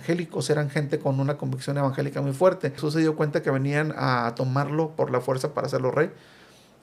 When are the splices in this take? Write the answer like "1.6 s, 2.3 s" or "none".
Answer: 2.8 s